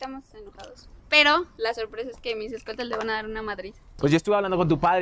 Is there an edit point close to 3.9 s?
yes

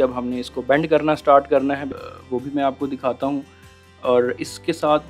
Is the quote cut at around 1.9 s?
yes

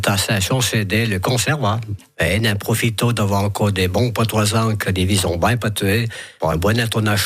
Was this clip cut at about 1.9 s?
yes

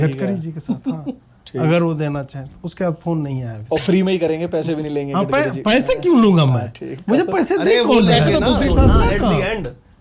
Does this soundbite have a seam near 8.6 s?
yes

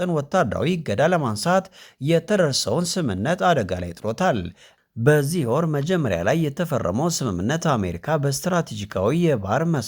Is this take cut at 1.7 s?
no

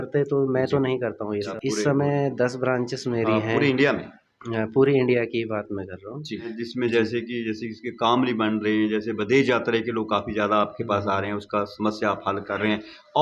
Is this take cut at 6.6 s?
yes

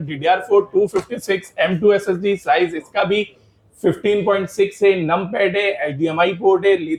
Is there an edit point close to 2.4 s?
no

